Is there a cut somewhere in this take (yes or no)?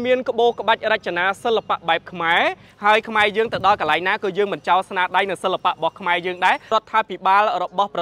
yes